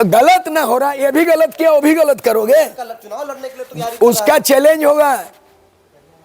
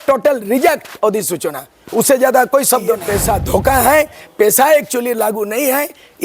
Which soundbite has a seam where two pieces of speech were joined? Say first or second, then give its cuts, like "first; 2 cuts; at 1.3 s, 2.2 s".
second; 1 cut; at 3.0 s